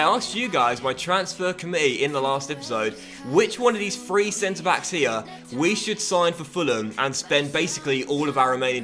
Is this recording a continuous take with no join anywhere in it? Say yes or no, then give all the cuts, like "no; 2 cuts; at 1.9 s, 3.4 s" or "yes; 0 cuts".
yes; 0 cuts